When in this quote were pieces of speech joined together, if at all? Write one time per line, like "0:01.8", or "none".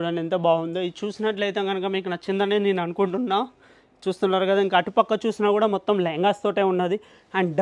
none

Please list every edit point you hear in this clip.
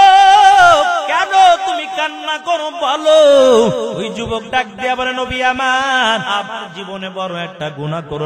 0:01.1
0:04.1
0:06.3

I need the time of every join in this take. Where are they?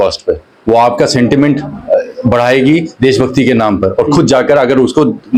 none

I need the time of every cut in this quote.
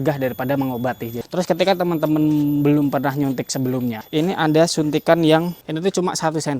0:01.1
0:04.0
0:05.6

